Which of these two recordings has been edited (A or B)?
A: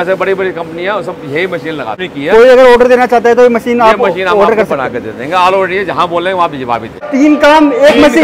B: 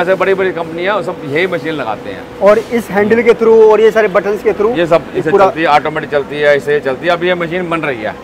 A